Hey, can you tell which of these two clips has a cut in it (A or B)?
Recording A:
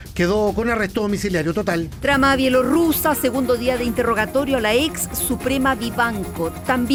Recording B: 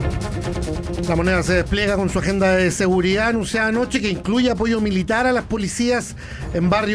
B